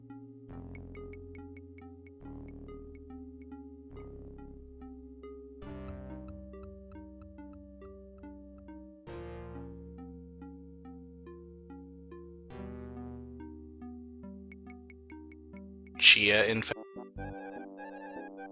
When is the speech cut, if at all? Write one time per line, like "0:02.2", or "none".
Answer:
none